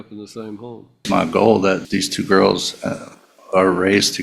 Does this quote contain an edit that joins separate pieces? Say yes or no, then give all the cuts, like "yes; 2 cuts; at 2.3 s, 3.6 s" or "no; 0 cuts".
yes; 2 cuts; at 1.0 s, 1.8 s